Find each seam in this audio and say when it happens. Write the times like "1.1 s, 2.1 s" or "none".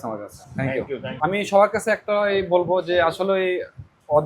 1.0 s